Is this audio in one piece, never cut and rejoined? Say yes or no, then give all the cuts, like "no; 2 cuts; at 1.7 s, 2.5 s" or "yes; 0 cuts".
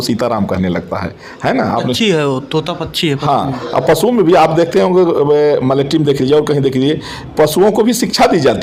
yes; 0 cuts